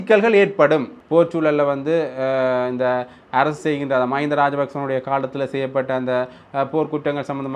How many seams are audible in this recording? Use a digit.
1